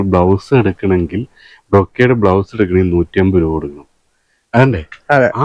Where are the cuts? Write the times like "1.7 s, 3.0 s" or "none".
none

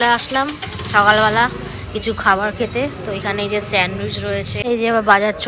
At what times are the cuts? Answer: 4.5 s

